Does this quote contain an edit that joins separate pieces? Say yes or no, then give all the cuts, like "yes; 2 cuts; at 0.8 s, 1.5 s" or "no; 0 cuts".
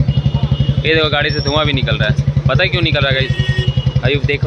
no; 0 cuts